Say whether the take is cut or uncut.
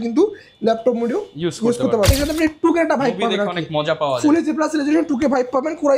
cut